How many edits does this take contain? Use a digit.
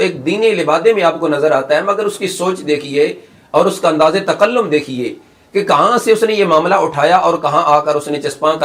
0